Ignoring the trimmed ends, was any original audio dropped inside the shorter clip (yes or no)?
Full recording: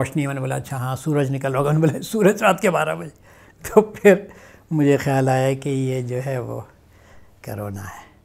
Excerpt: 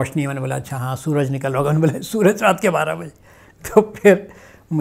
no